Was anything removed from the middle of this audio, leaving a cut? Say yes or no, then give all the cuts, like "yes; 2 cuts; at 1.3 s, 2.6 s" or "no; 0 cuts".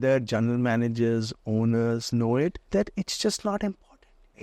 yes; 1 cut; at 2.6 s